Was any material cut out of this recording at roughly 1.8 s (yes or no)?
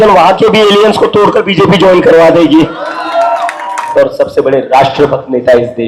no